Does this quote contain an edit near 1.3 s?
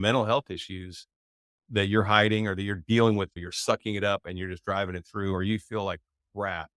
no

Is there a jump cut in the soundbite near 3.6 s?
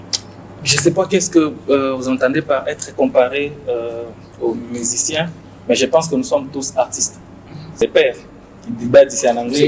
no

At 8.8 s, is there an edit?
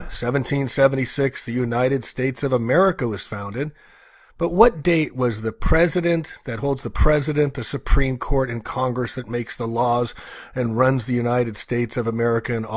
no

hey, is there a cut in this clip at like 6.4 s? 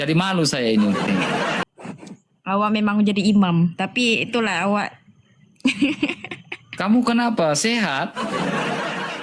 no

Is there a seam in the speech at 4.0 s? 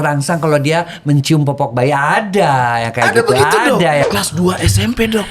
yes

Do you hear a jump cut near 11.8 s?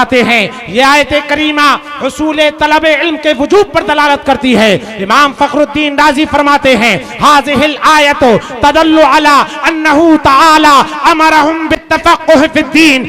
yes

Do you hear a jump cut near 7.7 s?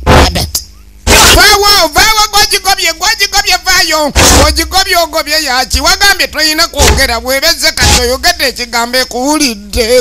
no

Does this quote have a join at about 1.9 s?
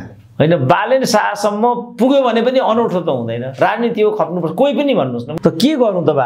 no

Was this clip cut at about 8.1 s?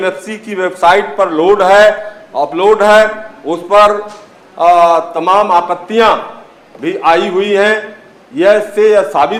no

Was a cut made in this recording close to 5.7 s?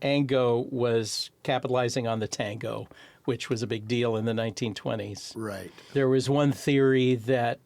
yes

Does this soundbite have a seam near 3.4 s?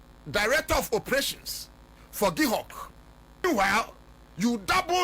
yes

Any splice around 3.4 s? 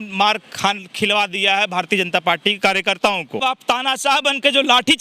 yes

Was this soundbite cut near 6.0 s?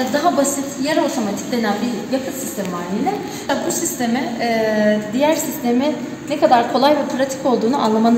no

